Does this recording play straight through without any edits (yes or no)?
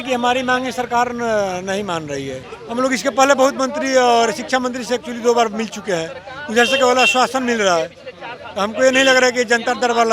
no